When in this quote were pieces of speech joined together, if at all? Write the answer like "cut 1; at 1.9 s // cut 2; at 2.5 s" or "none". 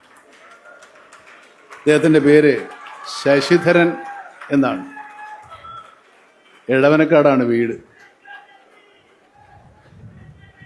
none